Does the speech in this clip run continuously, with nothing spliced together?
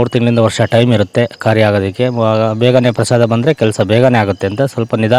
yes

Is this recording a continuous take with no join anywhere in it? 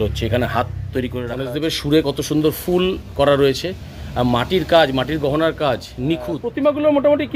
no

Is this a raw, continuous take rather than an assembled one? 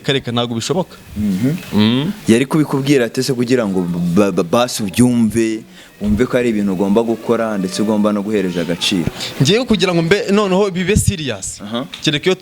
yes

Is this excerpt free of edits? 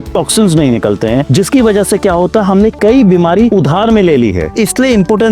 no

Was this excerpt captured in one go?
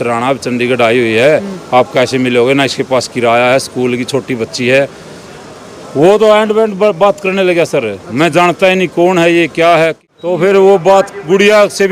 no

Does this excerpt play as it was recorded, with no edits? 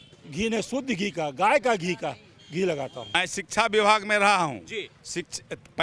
no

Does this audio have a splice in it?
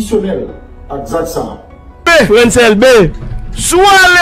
yes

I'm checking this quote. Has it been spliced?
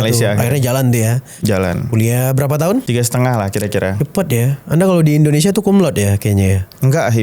yes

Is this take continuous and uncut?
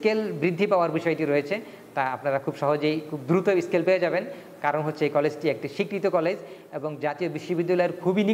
yes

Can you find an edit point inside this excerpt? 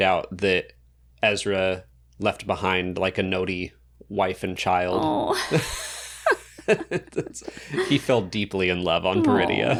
no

